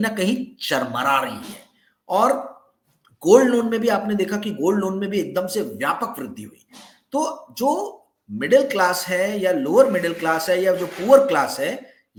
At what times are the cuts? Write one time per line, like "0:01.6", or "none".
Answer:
none